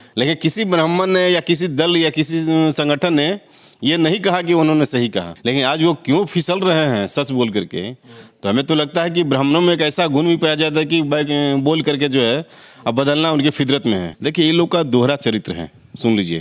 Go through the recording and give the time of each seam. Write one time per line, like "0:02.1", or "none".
0:05.3
0:14.2

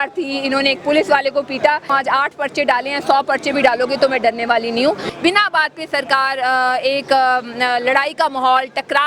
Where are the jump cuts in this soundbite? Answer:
0:01.8
0:05.1

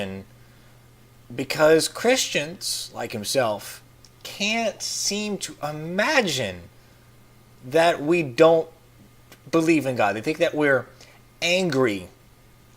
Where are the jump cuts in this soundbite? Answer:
0:01.4

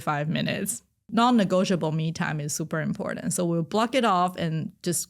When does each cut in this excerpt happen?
0:00.9

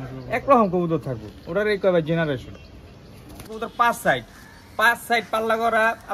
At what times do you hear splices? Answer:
0:03.4

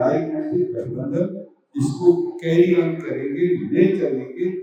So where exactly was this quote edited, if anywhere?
none

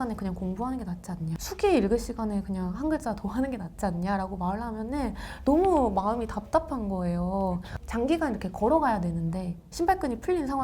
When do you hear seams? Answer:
0:01.3
0:07.7

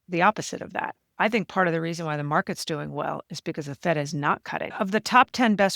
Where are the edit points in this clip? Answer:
0:04.7

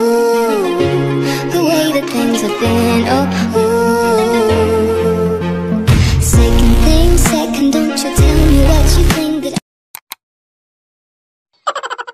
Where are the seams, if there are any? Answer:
0:09.8

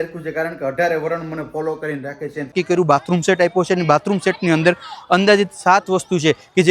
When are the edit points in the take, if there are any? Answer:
0:02.5

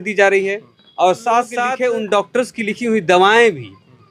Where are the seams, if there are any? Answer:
0:01.7

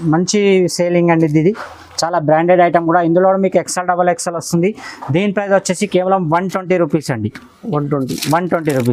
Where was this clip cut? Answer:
none

